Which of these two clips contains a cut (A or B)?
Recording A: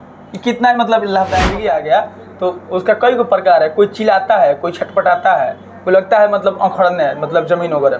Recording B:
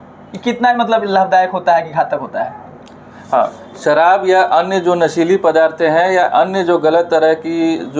A